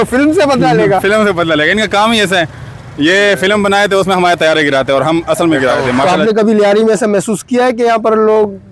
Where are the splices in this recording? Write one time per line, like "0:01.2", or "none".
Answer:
0:06.0